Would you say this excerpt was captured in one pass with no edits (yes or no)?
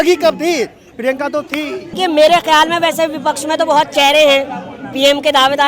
no